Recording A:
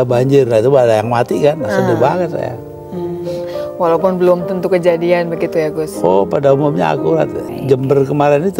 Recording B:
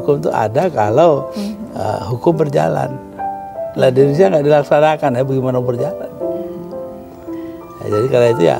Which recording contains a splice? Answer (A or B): A